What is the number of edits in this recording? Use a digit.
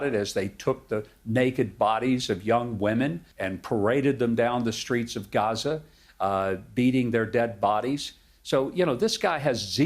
1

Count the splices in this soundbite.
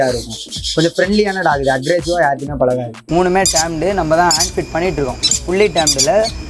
1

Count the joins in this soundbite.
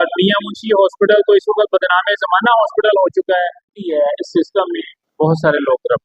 1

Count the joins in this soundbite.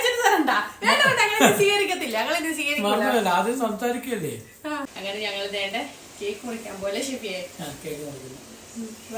1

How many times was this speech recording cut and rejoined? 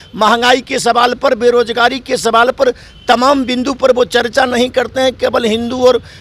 0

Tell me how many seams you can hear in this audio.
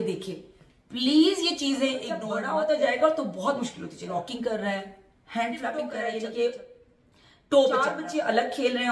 4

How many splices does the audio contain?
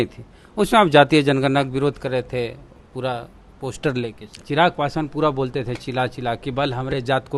1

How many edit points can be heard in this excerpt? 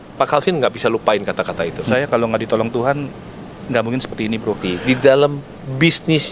2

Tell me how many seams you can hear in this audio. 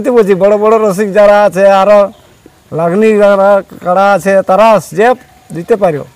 0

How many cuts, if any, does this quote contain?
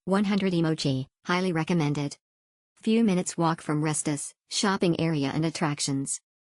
1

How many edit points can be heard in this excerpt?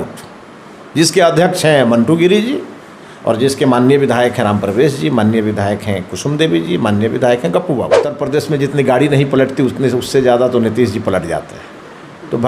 1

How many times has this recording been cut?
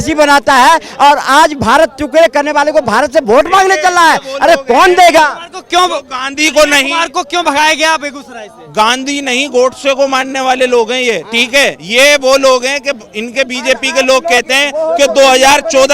0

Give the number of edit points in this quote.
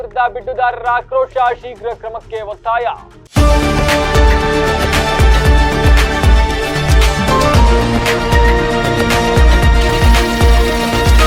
1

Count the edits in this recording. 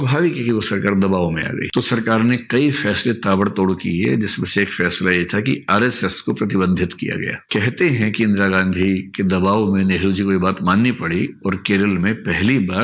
2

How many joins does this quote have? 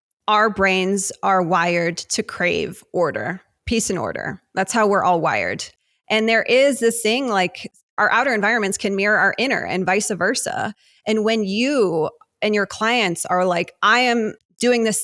2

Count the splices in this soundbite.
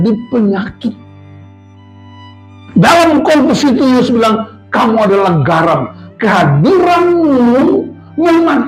0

